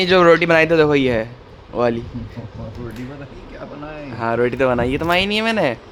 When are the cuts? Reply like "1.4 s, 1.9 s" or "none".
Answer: none